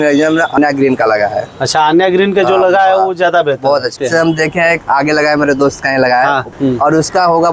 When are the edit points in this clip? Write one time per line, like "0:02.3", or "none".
0:03.9
0:06.5